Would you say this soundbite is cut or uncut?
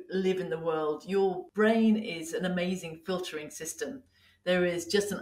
cut